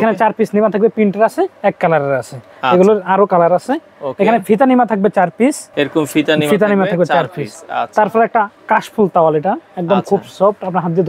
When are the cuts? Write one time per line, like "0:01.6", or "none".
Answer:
none

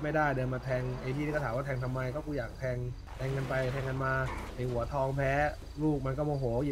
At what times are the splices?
0:03.0
0:04.4
0:05.7

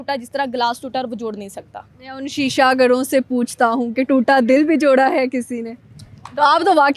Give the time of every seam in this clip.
none

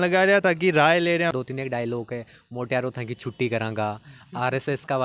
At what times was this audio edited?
0:01.3

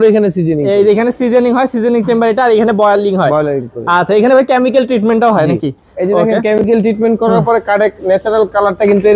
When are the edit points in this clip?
none

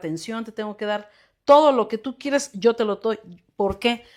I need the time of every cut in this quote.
none

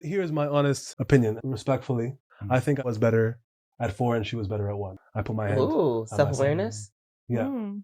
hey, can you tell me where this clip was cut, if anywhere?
0:00.9
0:02.3
0:04.9

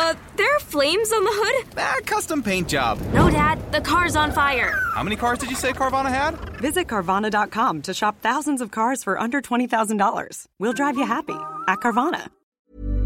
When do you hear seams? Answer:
none

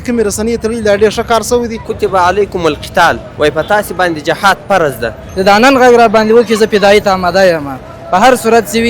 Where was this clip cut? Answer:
0:01.9
0:05.3

